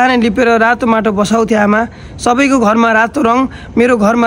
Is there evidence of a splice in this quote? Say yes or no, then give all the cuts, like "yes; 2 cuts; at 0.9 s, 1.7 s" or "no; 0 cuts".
no; 0 cuts